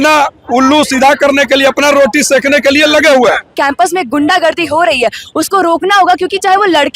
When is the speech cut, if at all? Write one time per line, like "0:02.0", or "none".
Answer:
0:03.5